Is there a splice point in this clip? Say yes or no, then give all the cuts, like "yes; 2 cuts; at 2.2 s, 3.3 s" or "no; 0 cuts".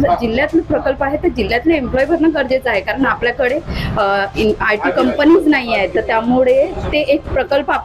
no; 0 cuts